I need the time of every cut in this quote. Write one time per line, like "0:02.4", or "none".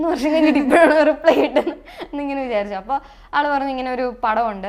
none